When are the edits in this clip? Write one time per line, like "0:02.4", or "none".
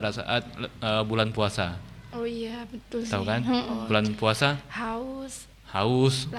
none